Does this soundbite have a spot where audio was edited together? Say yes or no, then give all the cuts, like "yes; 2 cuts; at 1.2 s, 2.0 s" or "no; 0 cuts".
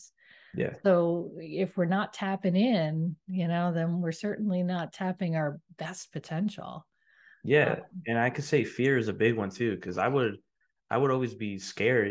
no; 0 cuts